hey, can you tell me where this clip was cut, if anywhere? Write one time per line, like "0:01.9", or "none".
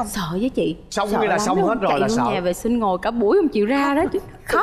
none